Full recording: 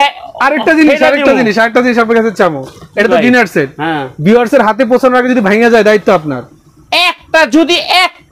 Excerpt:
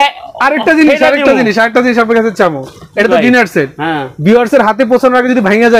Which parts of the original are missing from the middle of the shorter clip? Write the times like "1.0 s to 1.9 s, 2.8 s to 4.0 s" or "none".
none